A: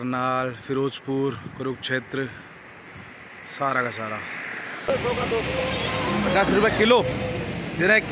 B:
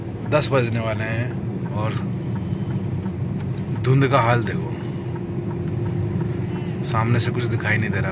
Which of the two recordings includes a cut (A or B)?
A